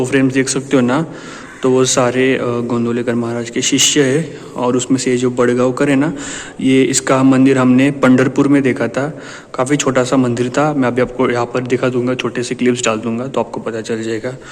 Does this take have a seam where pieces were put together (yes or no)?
no